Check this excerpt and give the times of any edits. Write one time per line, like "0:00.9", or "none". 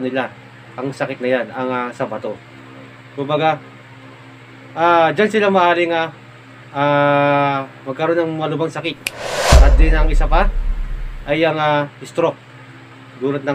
none